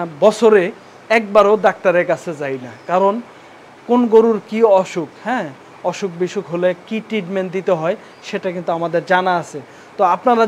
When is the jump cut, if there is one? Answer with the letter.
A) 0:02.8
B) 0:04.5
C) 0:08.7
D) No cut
D